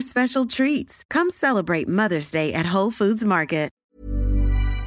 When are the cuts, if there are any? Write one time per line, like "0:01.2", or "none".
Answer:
0:03.7